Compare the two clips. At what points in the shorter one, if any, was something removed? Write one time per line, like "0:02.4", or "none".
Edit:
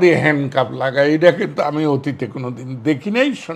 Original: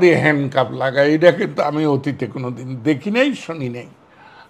none